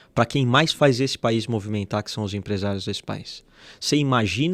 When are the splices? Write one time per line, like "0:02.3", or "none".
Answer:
none